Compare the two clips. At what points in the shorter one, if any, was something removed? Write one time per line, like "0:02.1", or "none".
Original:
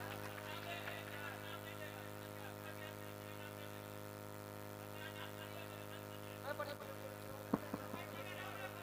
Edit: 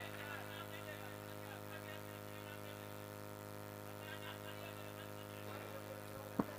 0:05.6